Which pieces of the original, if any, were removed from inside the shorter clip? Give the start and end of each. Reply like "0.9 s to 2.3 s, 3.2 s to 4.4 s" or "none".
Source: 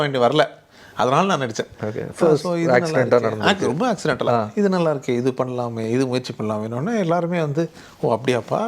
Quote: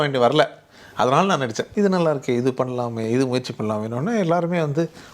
1.7 s to 4.5 s